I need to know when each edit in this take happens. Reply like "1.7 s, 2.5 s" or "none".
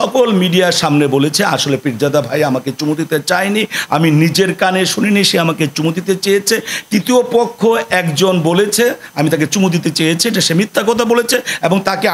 none